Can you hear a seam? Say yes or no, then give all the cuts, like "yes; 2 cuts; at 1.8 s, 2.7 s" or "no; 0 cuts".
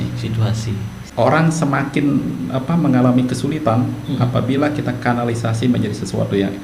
yes; 1 cut; at 1.0 s